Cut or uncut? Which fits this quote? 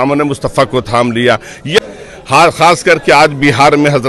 cut